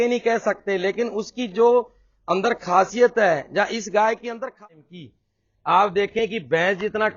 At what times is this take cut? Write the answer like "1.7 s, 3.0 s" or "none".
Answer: 4.6 s